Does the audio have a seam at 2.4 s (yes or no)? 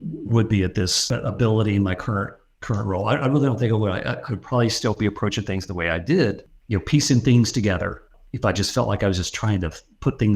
no